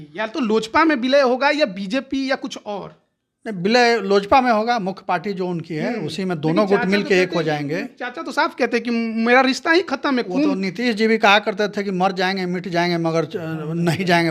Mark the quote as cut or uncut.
uncut